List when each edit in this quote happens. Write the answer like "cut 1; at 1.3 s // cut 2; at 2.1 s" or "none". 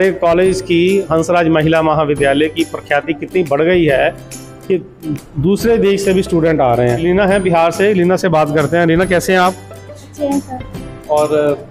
cut 1; at 7.0 s